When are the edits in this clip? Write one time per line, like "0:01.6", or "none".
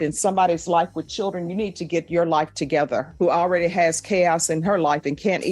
0:03.1